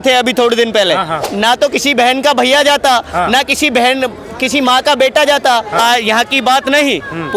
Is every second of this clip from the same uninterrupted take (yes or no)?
no